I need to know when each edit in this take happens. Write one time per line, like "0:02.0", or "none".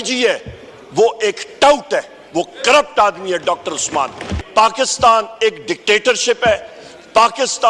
0:04.4